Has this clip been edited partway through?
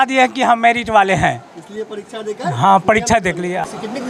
no; 0 cuts

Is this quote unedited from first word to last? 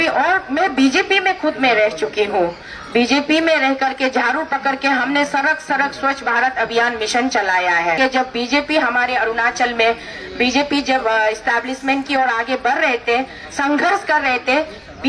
no; 1 cut; at 8.0 s

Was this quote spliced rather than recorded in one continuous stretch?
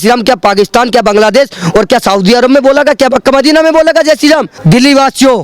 yes; 1 cut; at 4.5 s

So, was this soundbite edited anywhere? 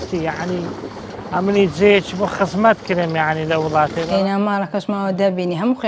yes; 1 cut; at 4.1 s

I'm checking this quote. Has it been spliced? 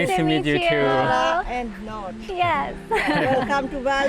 no; 0 cuts

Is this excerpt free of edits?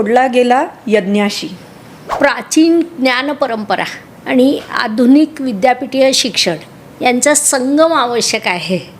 no; 1 cut; at 2.0 s

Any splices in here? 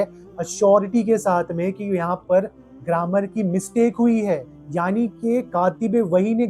yes; 1 cut; at 4.5 s

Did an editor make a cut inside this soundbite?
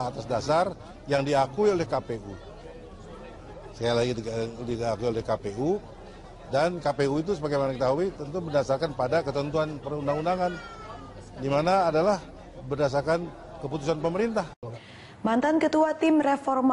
no; 0 cuts

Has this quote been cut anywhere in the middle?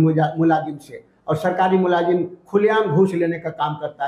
no; 0 cuts

